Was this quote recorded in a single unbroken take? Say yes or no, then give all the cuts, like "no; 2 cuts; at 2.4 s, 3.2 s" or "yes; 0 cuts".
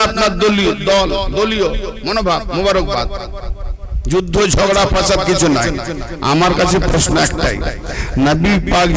yes; 0 cuts